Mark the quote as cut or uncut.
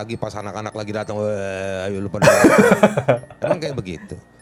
uncut